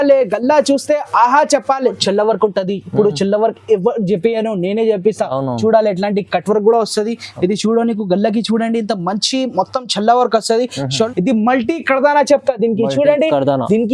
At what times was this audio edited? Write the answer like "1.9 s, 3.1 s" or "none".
2.0 s, 11.0 s